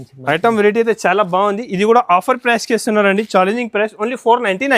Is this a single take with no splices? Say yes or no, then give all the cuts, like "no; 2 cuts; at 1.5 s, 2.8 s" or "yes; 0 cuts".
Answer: yes; 0 cuts